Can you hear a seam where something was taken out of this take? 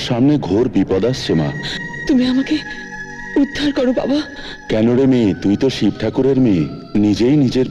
no; 0 cuts

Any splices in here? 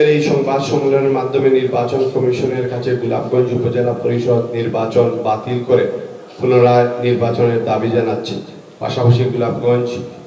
no; 0 cuts

